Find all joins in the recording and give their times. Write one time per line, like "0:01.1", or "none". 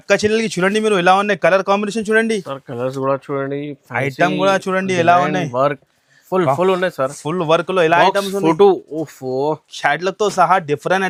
none